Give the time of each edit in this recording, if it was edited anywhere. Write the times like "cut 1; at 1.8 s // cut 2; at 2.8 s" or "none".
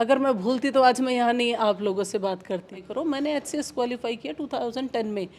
cut 1; at 2.8 s